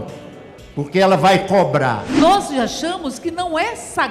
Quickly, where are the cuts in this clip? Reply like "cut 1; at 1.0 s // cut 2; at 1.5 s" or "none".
cut 1; at 2.2 s